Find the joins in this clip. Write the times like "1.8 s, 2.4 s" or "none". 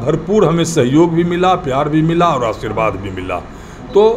none